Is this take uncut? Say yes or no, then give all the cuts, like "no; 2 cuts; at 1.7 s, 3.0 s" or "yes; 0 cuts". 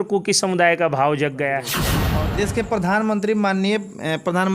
no; 1 cut; at 1.9 s